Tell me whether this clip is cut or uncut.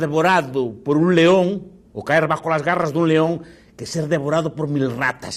uncut